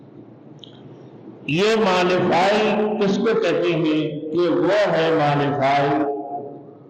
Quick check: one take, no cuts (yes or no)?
yes